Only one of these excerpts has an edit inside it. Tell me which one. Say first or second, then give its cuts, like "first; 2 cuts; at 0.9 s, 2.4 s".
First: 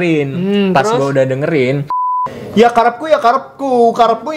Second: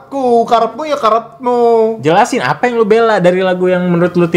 first; 1 cut; at 2.2 s